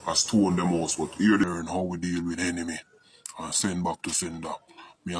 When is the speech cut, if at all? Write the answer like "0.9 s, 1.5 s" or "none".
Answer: 1.5 s

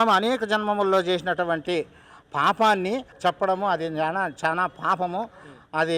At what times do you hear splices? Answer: 3.1 s

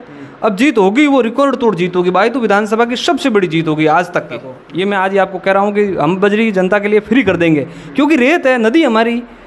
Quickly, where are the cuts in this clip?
4.6 s

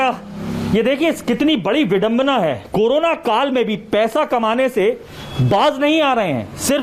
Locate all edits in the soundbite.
none

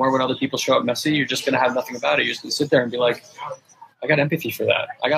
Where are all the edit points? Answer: none

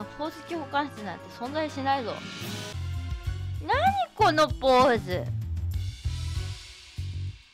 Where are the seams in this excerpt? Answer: 2.8 s

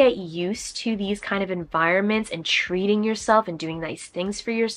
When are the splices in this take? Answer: none

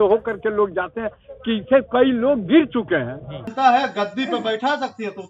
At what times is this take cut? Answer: 3.5 s

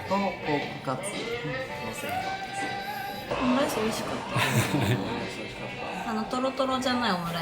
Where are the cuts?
3.3 s

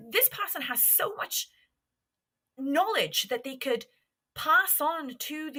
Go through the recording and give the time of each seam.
none

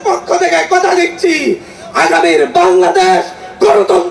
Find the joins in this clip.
none

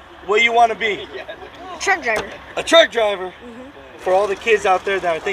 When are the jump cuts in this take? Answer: 4.0 s

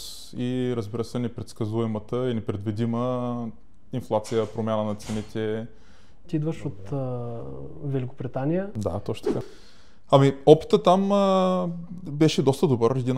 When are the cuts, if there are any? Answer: 6.3 s, 9.5 s

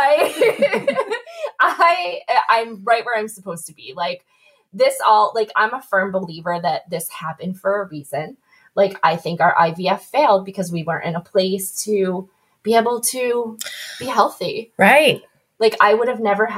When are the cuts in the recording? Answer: none

